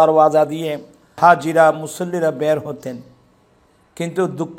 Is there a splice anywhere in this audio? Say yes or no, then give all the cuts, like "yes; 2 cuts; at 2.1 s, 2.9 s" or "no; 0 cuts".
yes; 1 cut; at 1.2 s